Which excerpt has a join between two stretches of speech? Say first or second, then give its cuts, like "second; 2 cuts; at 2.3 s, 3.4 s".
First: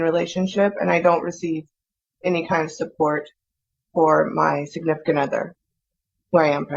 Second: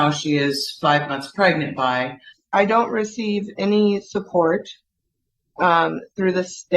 second; 1 cut; at 2.3 s